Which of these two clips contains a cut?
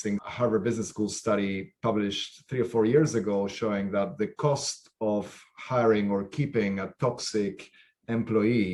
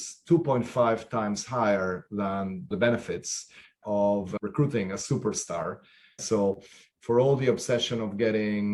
second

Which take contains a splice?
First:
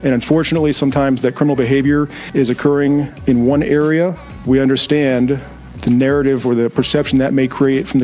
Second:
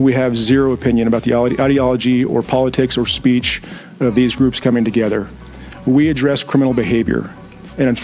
first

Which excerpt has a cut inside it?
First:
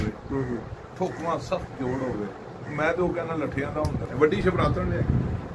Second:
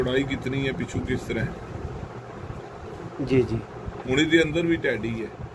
first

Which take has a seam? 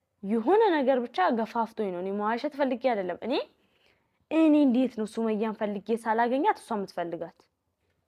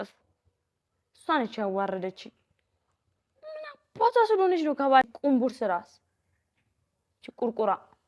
second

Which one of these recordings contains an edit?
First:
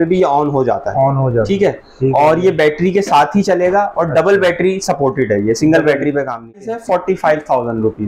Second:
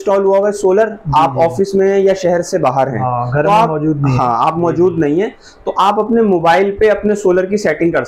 first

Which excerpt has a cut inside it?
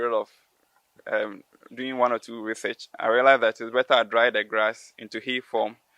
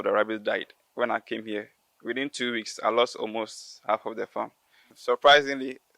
second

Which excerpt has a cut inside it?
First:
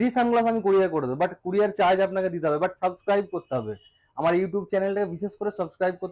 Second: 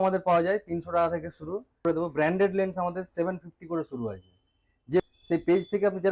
second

